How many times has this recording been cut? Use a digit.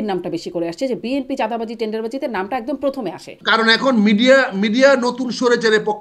1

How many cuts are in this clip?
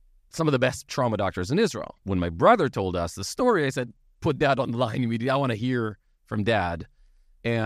1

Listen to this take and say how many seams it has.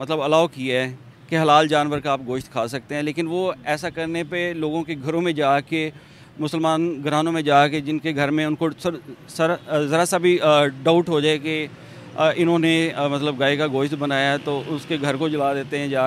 0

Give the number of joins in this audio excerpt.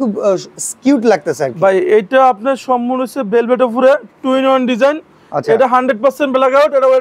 0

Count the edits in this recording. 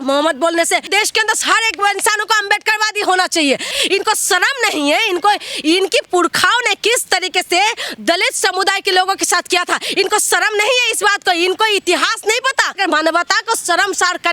3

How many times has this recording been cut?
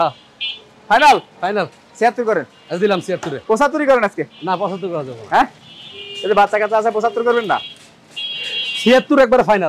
0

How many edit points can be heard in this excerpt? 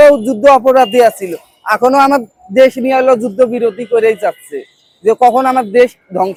0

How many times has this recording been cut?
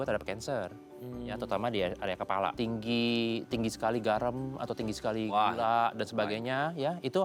1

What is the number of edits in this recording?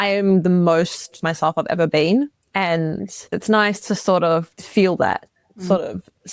2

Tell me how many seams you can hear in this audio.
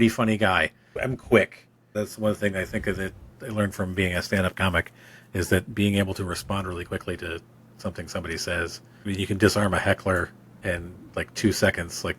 3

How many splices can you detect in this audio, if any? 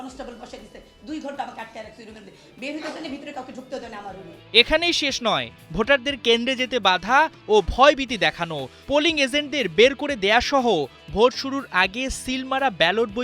0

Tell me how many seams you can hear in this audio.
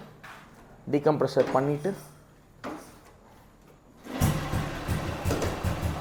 0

